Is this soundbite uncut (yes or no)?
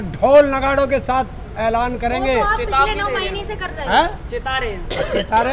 yes